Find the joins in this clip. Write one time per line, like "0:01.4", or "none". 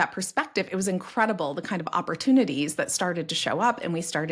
none